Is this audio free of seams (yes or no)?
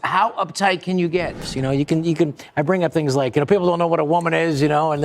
no